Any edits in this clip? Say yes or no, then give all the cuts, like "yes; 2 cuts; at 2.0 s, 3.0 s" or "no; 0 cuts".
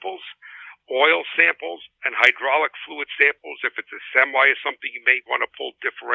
no; 0 cuts